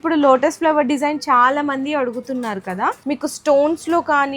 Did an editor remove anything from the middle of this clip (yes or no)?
yes